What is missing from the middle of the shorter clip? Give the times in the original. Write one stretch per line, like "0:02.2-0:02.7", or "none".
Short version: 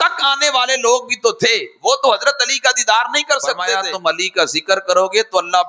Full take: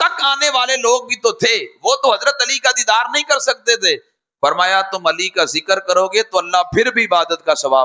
0:03.7-0:04.7